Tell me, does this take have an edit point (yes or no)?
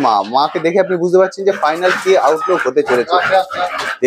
no